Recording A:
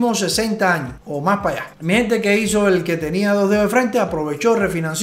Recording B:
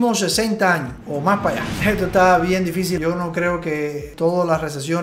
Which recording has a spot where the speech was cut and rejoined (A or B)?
B